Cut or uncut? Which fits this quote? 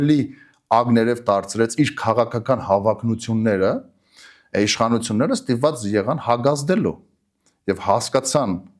uncut